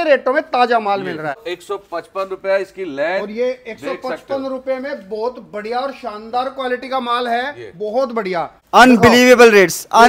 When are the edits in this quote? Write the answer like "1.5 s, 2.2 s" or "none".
1.5 s, 8.6 s